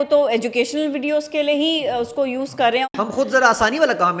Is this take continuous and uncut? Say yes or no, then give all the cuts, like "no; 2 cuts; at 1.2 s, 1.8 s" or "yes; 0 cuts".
no; 1 cut; at 2.9 s